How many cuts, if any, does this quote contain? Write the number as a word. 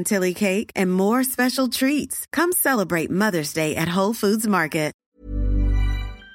one